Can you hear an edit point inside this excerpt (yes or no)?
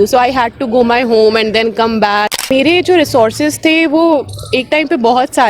yes